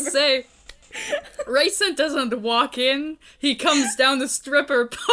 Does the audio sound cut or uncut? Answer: uncut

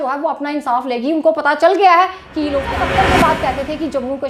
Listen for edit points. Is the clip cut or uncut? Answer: cut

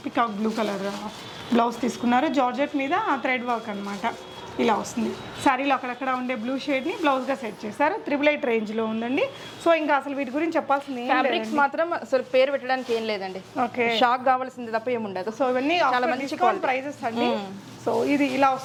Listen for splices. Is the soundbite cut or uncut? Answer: uncut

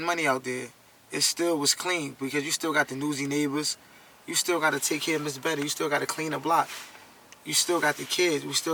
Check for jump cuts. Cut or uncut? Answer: uncut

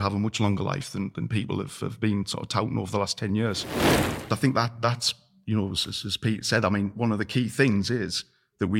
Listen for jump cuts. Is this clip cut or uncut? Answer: cut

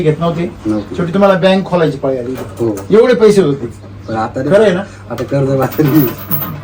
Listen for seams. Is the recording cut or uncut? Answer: uncut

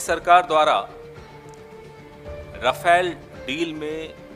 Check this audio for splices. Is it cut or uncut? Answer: uncut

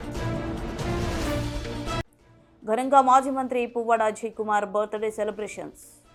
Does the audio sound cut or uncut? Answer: uncut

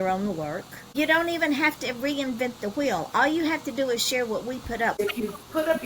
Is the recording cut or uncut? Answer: cut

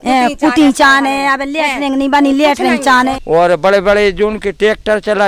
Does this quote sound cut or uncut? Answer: cut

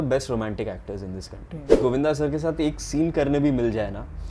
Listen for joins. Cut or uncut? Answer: cut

